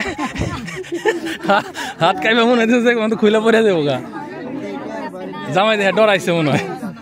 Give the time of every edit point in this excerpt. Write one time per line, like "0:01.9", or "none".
none